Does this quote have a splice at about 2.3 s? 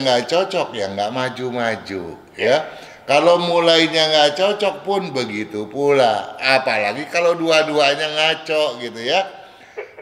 no; 0 cuts

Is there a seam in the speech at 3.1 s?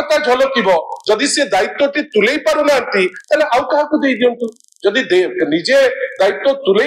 no; 0 cuts

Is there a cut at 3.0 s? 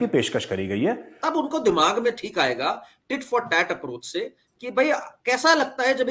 no; 1 cut; at 1.1 s

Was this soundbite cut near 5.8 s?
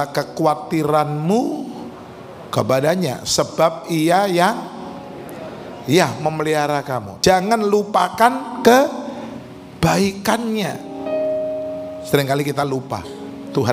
no; 1 cut; at 7.1 s

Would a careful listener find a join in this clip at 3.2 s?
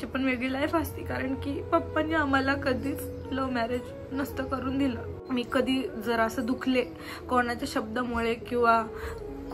no; 1 cut; at 5.1 s

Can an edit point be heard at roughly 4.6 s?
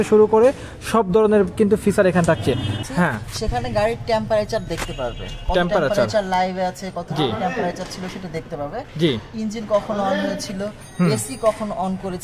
no; 1 cut; at 2.8 s

